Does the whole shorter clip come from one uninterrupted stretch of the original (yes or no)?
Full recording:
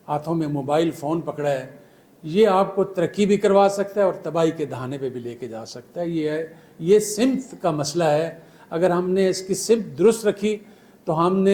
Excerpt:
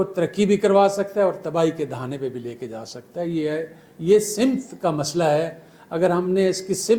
yes